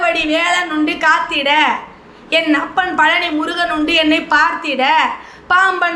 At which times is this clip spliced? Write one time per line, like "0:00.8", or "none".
none